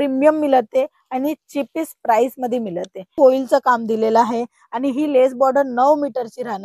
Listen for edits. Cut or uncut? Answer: cut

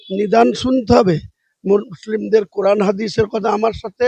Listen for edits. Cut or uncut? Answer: uncut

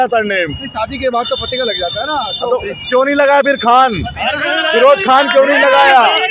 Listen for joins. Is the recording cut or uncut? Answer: uncut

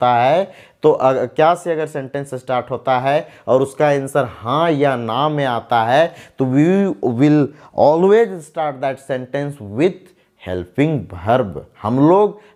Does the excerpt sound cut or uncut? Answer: uncut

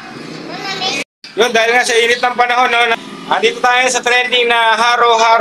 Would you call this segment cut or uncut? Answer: cut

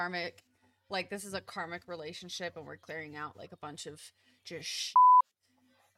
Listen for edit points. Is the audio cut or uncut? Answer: uncut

